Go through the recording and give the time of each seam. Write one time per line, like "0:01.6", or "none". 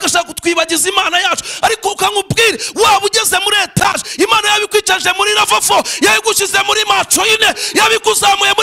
none